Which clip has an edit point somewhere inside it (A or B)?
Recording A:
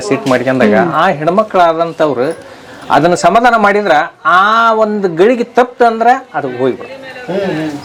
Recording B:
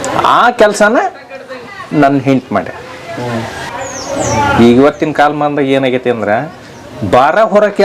B